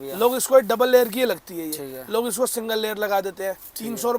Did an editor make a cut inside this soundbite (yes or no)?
no